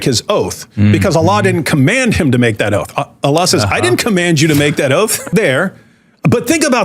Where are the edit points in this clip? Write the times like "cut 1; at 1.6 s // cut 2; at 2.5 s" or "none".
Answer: cut 1; at 5.3 s